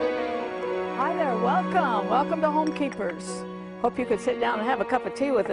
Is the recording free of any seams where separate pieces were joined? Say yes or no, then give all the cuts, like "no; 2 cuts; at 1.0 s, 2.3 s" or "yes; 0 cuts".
yes; 0 cuts